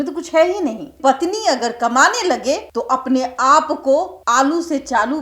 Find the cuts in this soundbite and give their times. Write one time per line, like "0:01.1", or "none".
0:01.0
0:02.7
0:04.2